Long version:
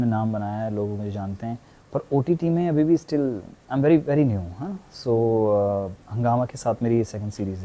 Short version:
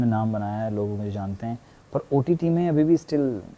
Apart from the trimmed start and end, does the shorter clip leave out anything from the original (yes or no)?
no